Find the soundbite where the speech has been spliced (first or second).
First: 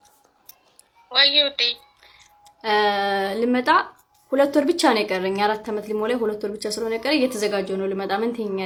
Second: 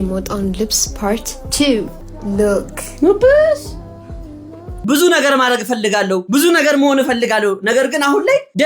second